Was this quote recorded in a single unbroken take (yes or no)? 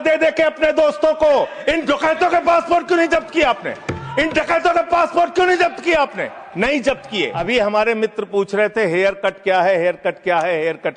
no